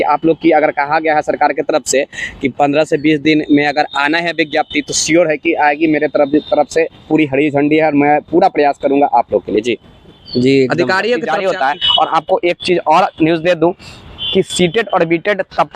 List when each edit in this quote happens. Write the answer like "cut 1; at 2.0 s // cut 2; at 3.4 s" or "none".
cut 1; at 11.3 s